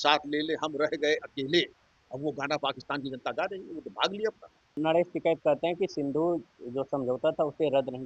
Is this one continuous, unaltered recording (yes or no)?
no